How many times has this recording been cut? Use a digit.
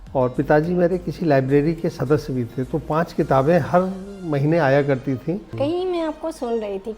1